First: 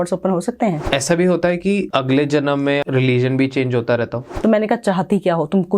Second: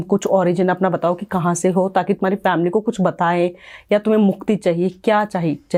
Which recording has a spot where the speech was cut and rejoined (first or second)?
first